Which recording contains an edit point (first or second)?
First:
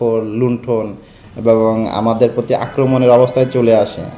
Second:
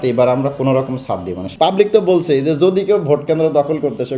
second